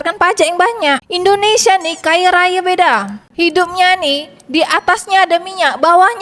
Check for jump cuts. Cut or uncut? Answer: cut